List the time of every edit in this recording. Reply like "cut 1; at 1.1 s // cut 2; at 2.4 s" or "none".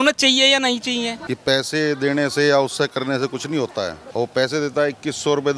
cut 1; at 1.2 s // cut 2; at 4.0 s